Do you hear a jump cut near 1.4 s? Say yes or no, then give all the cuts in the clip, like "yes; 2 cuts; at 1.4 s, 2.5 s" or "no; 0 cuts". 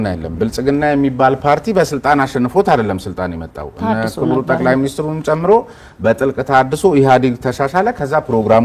no; 0 cuts